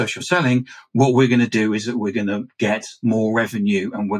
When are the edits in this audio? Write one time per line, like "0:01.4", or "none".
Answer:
none

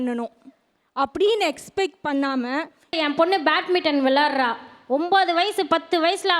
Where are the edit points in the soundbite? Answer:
0:03.0

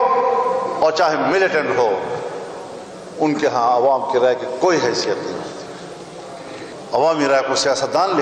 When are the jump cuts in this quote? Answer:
0:06.7

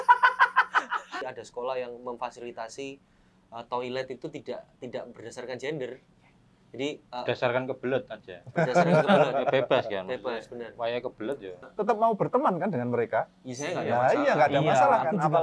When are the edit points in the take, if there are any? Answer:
0:01.2
0:11.6

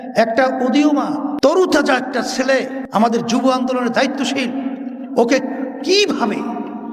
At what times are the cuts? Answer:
0:01.5
0:02.8

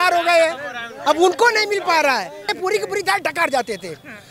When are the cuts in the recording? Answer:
0:02.5

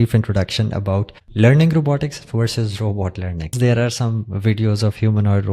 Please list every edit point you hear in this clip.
0:01.2
0:03.5

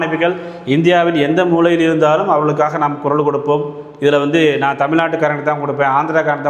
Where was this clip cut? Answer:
none

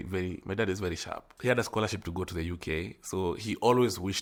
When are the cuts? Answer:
none

